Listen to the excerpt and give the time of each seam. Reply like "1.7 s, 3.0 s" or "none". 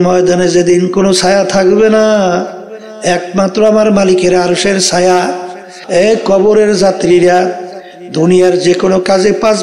5.7 s